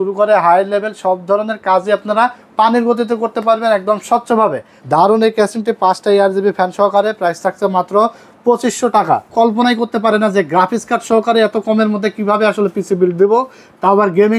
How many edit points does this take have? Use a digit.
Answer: 2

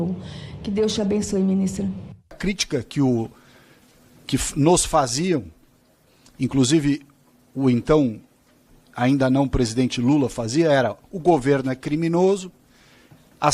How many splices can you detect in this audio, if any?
1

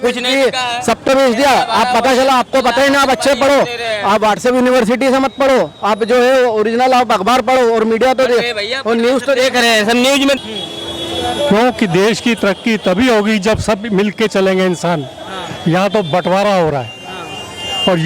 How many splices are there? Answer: 1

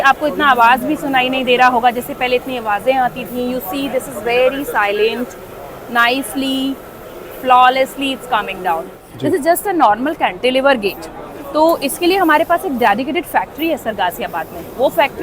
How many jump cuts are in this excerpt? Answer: 1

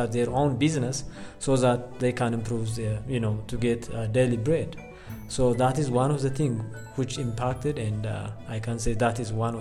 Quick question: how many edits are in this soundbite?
0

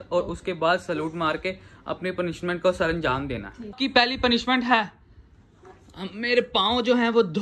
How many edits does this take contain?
1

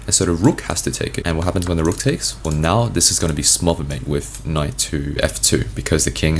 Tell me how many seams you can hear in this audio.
2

